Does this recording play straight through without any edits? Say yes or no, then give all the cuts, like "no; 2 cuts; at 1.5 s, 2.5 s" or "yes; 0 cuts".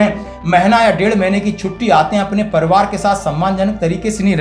yes; 0 cuts